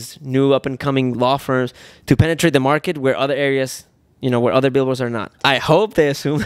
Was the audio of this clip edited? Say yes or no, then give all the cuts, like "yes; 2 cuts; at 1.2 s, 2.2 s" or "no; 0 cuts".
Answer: yes; 1 cut; at 5.4 s